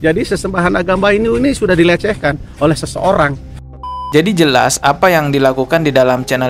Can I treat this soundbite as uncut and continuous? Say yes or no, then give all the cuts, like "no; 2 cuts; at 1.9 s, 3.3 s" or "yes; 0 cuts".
no; 1 cut; at 4.0 s